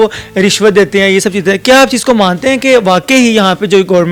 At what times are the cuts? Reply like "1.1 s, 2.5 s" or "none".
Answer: none